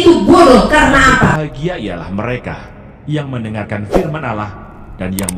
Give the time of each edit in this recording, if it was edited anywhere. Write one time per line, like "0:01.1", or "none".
0:01.5